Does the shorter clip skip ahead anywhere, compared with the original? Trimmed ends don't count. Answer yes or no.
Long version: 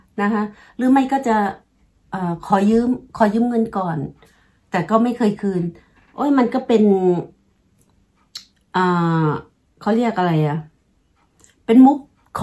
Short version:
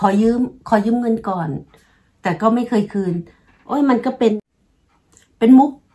yes